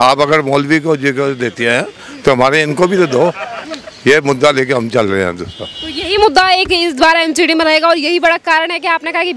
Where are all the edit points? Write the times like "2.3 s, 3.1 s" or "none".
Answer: none